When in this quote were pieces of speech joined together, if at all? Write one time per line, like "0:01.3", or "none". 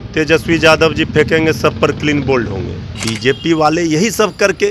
0:03.1